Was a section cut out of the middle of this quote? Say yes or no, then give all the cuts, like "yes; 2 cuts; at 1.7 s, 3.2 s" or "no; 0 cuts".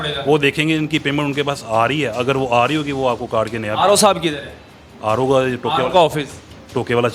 no; 0 cuts